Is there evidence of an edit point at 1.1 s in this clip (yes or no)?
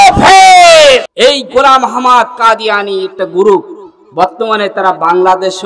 yes